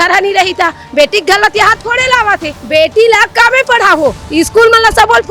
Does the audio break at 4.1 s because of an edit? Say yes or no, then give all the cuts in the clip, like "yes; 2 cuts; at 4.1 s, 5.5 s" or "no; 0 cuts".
no; 1 cut; at 2.5 s